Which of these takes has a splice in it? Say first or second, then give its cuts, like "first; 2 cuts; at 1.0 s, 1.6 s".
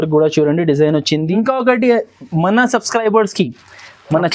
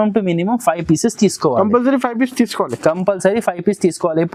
first; 1 cut; at 1.4 s